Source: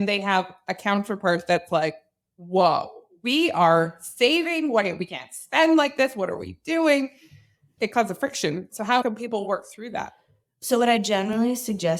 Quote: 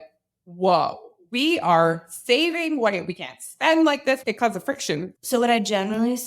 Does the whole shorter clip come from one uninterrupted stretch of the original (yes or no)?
no